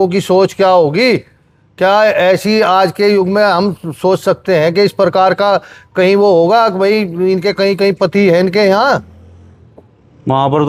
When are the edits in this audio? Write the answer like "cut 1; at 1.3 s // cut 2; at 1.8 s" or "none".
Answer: none